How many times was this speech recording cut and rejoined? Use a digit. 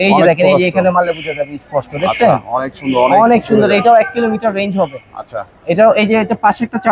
0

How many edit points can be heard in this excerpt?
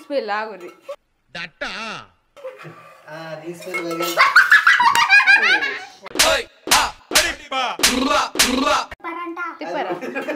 1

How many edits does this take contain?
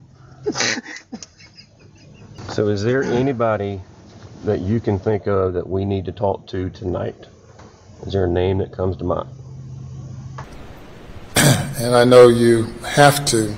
2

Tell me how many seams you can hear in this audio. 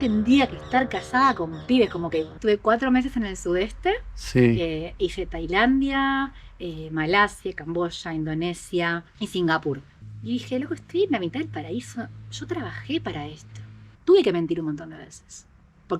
3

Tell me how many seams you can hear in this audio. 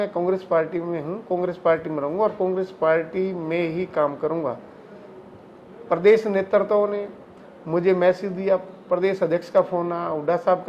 0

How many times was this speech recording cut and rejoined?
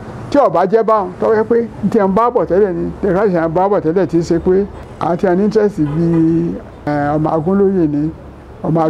2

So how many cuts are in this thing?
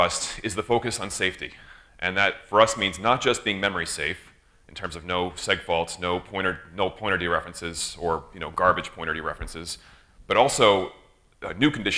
1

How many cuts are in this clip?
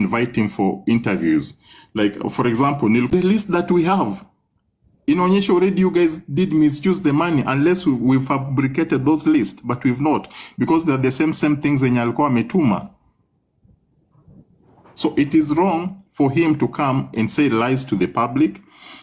0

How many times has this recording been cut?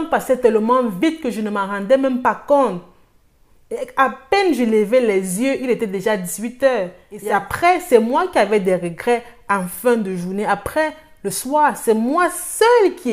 1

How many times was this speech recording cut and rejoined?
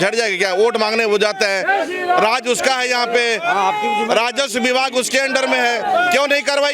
0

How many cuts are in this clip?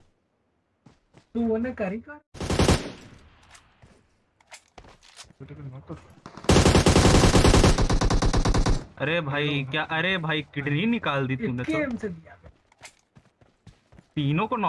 1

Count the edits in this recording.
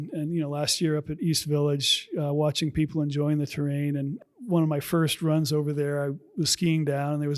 1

